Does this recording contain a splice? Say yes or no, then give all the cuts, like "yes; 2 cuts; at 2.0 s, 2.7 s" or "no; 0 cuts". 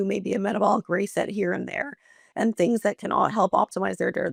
no; 0 cuts